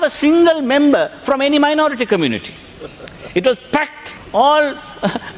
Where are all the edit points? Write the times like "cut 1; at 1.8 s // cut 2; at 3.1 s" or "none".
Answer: cut 1; at 4.1 s